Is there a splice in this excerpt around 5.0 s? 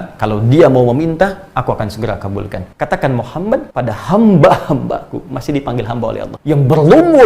no; 3 cuts; at 2.6 s, 3.7 s, 6.3 s

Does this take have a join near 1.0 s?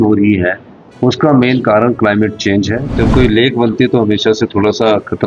no; 1 cut; at 2.8 s

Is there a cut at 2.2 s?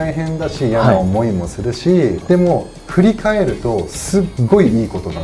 yes; 1 cut; at 2.2 s

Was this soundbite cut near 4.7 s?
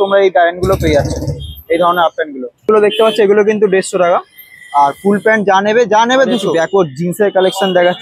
no; 2 cuts; at 2.6 s, 6.5 s

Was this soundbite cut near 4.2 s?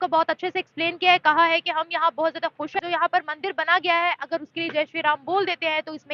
no; 1 cut; at 2.8 s

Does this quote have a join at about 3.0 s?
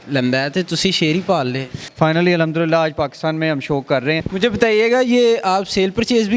no; 2 cuts; at 1.8 s, 4.2 s

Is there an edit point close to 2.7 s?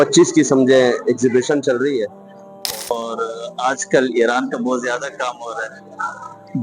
yes; 1 cut; at 2.7 s

